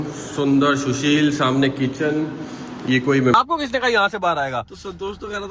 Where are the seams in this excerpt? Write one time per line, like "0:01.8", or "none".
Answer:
0:03.3